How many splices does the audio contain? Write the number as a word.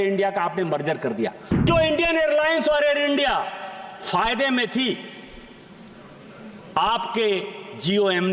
one